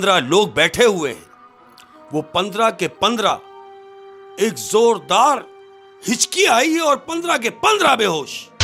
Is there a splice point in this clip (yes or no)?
no